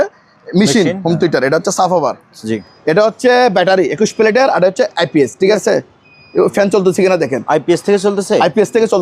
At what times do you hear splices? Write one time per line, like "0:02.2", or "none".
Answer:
0:02.6
0:05.6